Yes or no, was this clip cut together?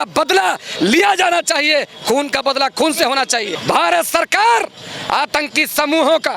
yes